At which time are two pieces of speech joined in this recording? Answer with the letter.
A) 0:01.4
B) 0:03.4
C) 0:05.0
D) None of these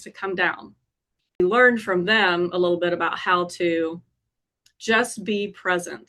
A